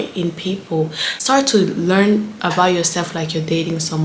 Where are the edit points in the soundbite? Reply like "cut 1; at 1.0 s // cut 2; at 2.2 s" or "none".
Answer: cut 1; at 1.1 s